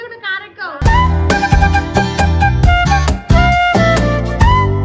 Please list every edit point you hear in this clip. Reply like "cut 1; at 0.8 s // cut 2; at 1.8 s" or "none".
none